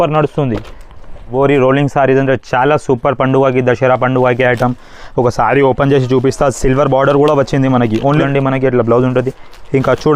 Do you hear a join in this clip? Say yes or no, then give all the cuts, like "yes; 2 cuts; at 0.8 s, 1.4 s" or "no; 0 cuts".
yes; 2 cuts; at 1.3 s, 8.2 s